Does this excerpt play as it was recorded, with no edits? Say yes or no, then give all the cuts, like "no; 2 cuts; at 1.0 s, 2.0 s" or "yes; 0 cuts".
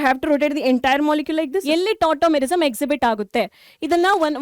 no; 1 cut; at 1.6 s